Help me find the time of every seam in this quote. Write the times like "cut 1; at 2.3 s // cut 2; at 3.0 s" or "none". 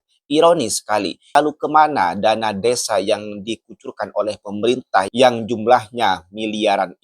cut 1; at 1.2 s